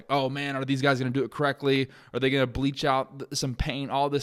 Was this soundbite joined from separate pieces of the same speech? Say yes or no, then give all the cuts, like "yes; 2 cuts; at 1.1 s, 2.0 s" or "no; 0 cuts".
no; 0 cuts